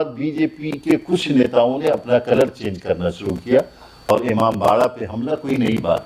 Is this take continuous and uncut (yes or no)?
no